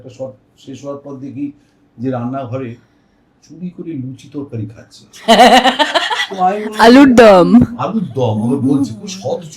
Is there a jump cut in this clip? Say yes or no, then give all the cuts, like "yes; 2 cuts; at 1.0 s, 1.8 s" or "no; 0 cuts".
no; 0 cuts